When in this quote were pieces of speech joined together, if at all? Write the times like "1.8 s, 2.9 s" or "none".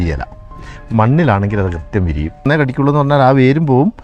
2.5 s